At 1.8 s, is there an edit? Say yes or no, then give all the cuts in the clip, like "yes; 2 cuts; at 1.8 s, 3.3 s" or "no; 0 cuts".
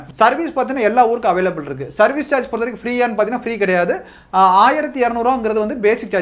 no; 0 cuts